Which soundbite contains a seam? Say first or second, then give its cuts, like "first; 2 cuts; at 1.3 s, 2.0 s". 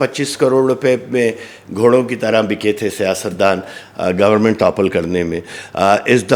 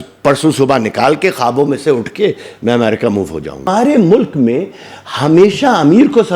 second; 1 cut; at 3.7 s